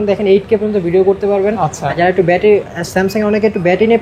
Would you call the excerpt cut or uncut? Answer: uncut